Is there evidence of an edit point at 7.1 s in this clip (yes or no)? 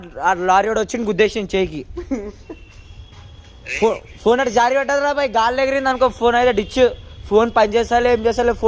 no